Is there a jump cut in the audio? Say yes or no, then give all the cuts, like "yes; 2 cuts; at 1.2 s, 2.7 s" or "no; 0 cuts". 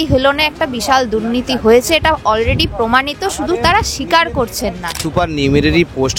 yes; 1 cut; at 5.0 s